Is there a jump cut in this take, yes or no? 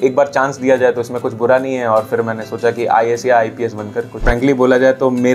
yes